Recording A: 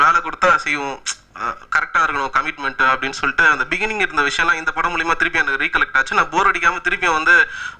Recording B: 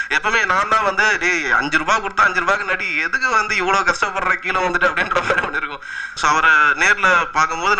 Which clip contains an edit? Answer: B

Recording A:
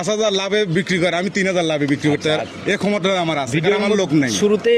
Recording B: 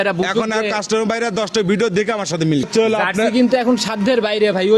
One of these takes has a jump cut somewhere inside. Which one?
B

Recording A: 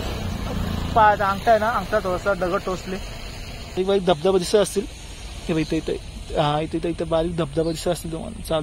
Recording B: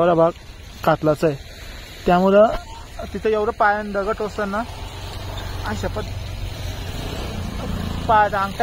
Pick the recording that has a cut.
A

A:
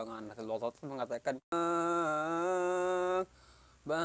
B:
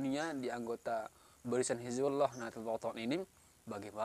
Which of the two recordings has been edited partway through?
A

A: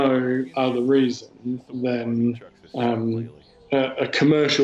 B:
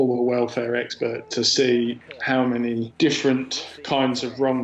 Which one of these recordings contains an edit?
B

